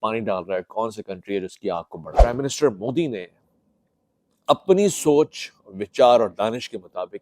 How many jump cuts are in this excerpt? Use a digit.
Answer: 1